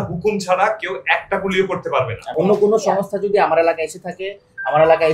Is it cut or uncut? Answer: cut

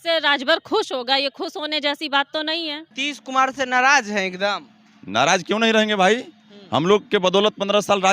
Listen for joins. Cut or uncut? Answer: cut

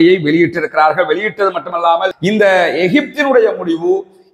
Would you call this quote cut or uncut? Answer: cut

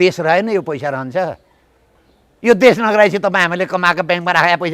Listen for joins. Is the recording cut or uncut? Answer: uncut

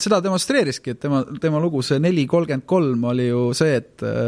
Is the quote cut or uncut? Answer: uncut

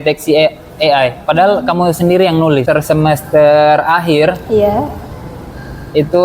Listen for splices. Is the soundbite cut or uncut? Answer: cut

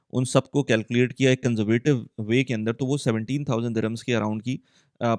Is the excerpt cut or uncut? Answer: uncut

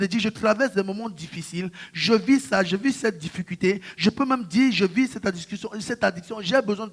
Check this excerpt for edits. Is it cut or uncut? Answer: uncut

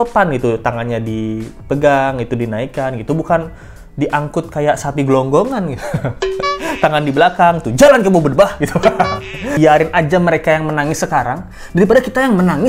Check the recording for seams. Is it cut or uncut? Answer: cut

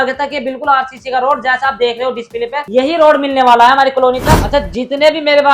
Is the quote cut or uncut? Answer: cut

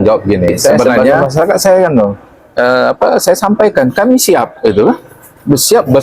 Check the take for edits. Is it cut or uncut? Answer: cut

